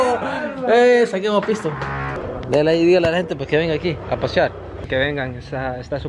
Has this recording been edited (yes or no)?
yes